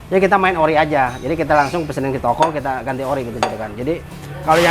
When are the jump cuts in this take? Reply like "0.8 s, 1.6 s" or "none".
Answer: none

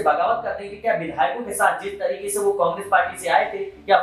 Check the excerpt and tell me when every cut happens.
none

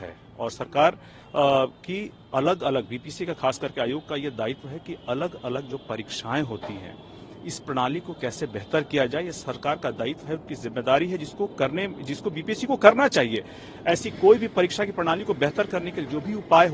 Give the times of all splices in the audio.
none

